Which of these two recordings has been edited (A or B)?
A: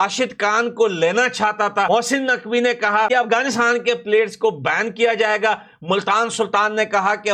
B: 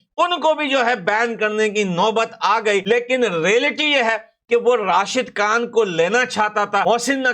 B